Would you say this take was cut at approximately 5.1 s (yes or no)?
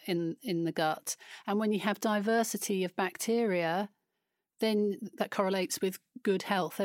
yes